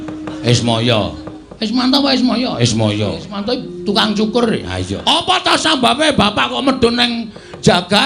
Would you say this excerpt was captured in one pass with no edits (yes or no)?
no